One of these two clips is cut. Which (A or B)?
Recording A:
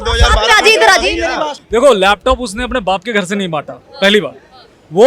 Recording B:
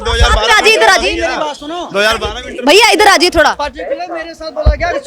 A